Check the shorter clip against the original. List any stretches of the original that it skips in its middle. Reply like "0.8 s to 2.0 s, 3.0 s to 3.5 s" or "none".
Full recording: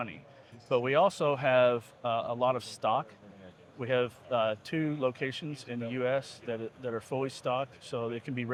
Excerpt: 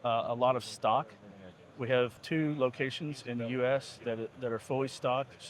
4.2 s to 4.6 s